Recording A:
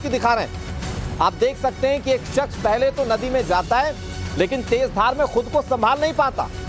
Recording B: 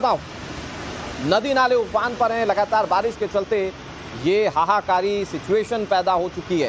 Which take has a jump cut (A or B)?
B